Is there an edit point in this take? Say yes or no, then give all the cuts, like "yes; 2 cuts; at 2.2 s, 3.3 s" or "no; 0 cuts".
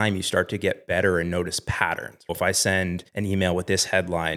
yes; 2 cuts; at 2.3 s, 3.0 s